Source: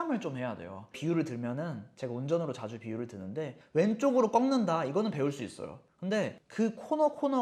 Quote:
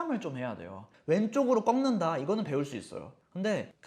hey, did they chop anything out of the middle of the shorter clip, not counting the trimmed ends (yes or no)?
yes